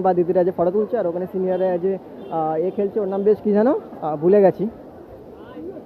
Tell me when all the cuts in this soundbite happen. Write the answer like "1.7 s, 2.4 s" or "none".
none